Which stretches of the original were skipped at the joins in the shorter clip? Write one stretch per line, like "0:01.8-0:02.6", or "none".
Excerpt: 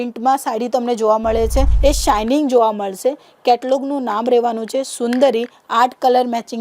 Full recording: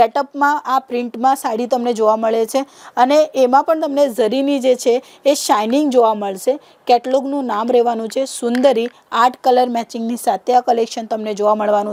0:02.7-0:05.1